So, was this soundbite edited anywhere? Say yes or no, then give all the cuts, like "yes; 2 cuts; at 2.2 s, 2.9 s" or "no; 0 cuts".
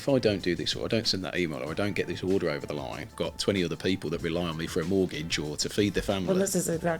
yes; 1 cut; at 3.1 s